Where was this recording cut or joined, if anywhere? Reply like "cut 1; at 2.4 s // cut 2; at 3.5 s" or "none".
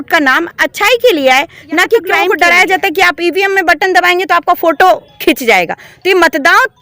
cut 1; at 2.3 s